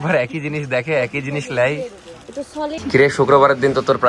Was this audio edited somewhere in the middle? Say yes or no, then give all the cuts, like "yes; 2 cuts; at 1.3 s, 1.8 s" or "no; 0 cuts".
yes; 1 cut; at 2.8 s